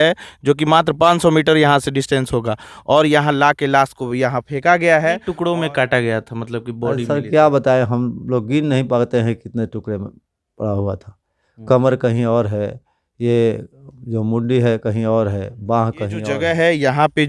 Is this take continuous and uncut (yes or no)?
no